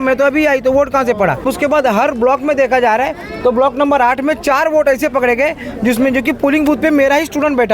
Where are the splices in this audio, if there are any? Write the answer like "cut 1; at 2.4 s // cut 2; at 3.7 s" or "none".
cut 1; at 1.5 s